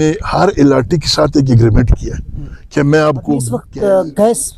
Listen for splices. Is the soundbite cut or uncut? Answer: cut